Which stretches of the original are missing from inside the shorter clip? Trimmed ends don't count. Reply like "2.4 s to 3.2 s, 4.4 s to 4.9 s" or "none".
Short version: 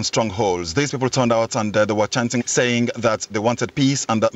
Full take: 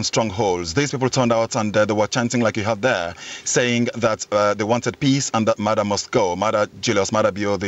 2.4 s to 3.4 s, 4.3 s to 4.5 s